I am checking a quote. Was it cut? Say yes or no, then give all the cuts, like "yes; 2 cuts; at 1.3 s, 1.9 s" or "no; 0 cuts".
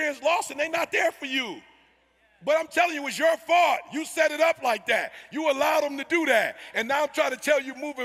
no; 0 cuts